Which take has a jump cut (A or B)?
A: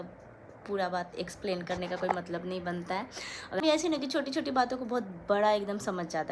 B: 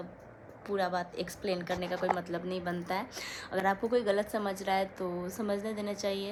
A